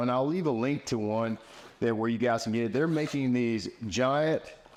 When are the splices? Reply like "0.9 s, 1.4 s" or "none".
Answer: none